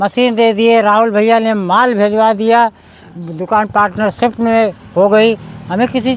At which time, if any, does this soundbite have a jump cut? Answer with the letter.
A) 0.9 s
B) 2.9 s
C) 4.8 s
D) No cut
D